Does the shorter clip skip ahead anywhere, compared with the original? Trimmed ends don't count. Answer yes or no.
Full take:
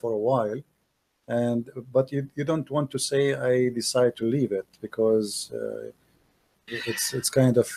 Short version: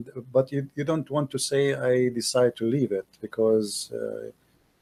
no